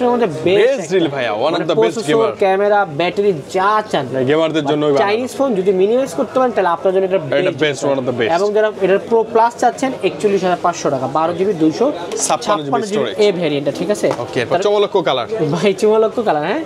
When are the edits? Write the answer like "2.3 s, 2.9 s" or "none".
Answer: none